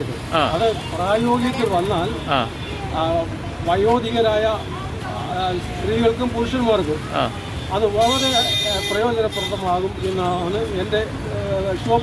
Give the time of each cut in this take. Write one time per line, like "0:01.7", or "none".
none